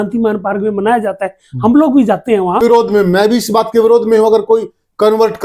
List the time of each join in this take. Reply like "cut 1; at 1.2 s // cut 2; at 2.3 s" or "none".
cut 1; at 2.6 s